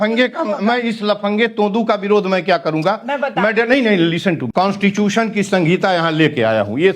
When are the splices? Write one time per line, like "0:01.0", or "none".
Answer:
0:04.4